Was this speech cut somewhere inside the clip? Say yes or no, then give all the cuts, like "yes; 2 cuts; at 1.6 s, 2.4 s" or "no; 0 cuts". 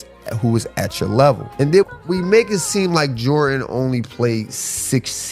yes; 1 cut; at 1.5 s